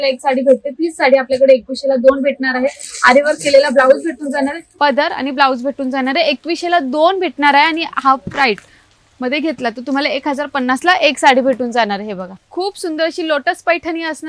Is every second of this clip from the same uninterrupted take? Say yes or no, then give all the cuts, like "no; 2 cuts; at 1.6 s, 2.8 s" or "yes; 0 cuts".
no; 2 cuts; at 4.6 s, 12.3 s